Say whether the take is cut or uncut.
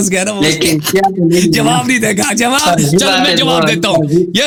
uncut